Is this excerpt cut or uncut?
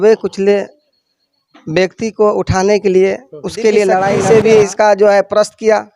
cut